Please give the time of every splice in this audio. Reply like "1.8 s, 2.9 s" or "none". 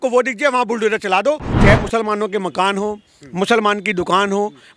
1.5 s

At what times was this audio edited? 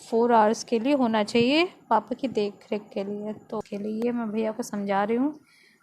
3.6 s

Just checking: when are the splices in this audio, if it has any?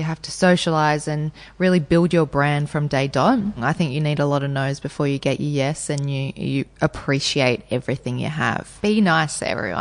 3.6 s, 8.7 s

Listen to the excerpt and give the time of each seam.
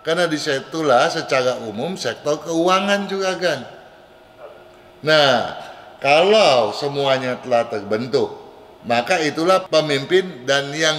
none

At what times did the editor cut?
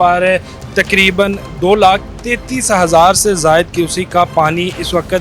none

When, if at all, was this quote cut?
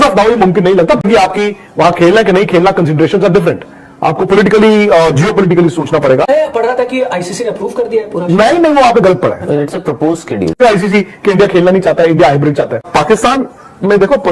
1.0 s, 6.3 s, 10.6 s, 12.8 s

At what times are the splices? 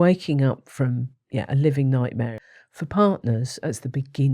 2.3 s

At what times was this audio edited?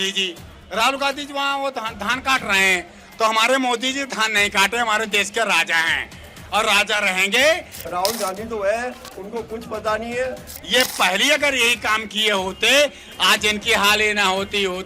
7.8 s, 10.5 s

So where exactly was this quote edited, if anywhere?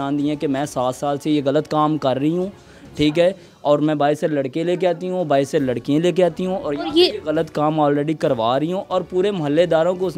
none

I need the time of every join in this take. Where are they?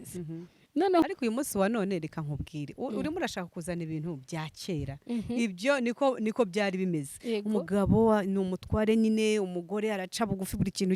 1.0 s

